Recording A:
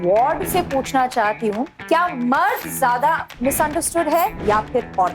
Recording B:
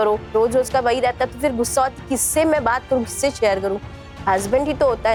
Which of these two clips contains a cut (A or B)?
A